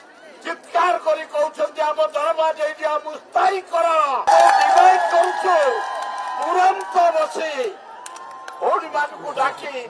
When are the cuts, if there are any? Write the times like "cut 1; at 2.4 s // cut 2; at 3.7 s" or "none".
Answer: cut 1; at 4.3 s